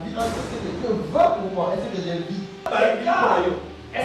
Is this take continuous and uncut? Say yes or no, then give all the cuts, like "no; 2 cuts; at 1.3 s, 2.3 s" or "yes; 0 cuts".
no; 1 cut; at 2.7 s